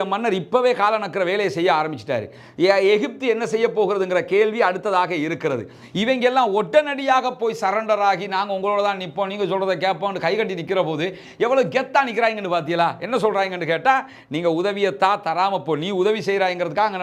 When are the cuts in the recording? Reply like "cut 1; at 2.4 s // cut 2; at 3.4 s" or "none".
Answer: none